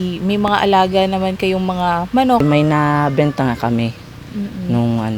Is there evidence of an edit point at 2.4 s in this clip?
yes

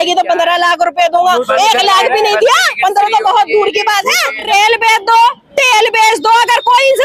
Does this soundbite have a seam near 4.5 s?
yes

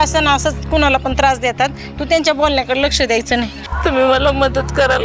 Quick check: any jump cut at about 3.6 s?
yes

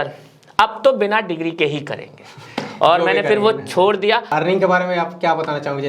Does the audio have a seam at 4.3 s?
yes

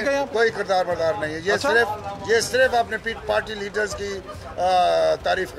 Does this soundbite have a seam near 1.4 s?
no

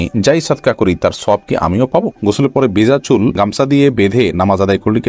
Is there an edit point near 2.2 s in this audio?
yes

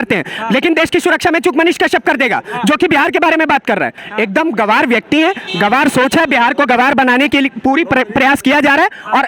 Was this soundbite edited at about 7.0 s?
no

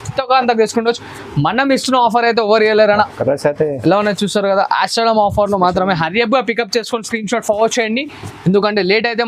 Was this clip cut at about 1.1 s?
no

